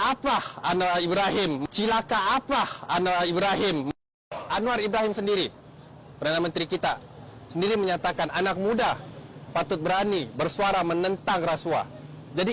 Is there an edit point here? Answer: yes; 2 cuts; at 1.7 s, 3.8 s

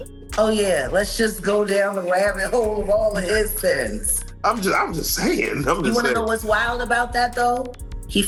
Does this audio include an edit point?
no; 0 cuts

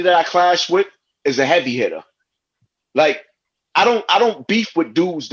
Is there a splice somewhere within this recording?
no; 0 cuts

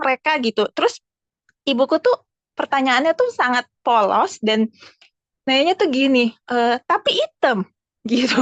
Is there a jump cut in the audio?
no; 0 cuts

